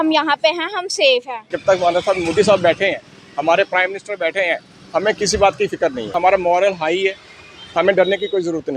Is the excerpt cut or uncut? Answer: cut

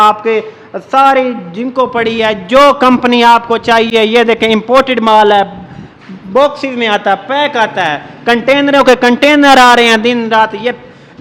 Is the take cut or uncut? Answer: uncut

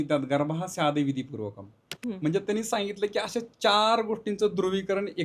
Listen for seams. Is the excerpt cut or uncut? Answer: uncut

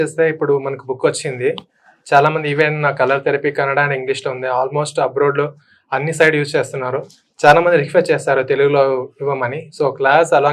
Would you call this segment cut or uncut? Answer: uncut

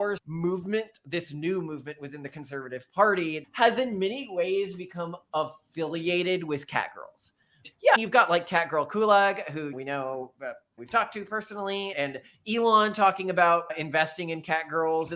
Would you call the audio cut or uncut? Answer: cut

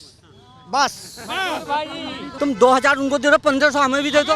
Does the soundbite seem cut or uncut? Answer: cut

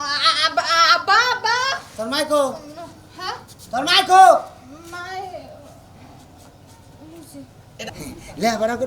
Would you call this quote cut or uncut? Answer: cut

